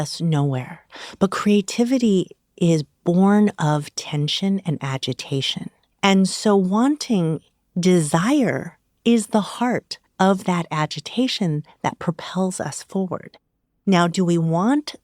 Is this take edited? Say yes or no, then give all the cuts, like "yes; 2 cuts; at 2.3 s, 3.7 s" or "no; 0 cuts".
no; 0 cuts